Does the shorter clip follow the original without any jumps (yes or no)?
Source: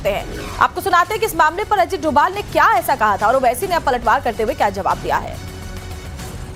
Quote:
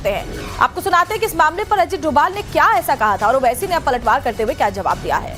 yes